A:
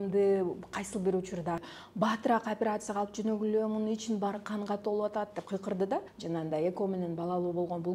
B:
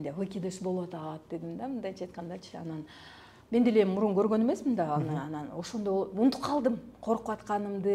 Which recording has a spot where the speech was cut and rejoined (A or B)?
A